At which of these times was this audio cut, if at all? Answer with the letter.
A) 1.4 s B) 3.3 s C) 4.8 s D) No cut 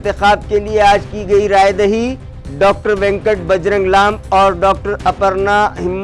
D